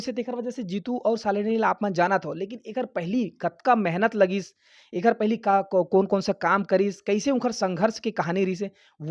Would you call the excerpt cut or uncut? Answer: uncut